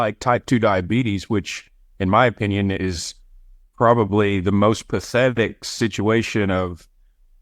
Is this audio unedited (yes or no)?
yes